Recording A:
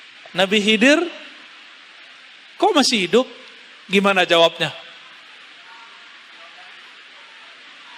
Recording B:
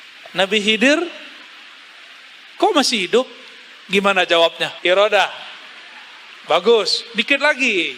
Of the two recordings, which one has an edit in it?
B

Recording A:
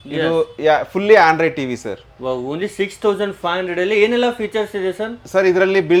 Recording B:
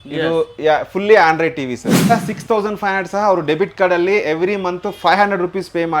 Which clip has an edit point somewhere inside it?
B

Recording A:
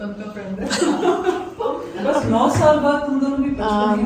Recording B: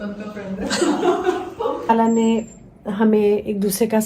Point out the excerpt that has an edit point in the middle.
B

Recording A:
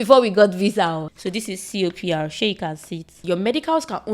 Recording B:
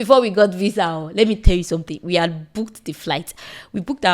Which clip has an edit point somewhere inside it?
A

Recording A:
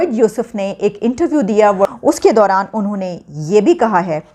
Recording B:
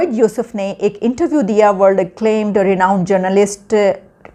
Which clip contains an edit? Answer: A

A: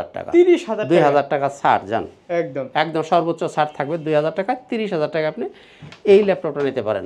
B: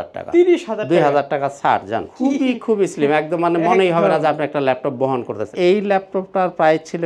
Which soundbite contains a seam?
B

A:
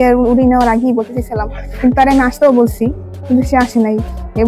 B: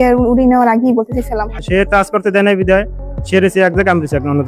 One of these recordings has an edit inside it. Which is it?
B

